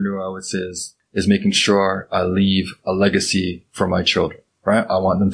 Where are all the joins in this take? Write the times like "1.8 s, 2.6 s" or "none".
1.0 s

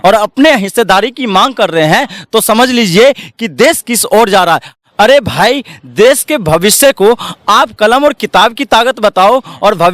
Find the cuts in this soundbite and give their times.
4.7 s

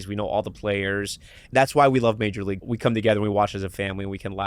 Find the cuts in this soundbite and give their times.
1.5 s, 2.7 s

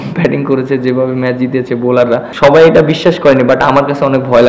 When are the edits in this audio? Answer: 2.3 s

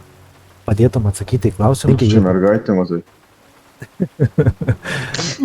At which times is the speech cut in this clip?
1.8 s

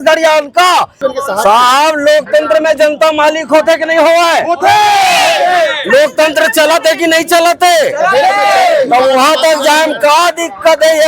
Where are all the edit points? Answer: 1.0 s

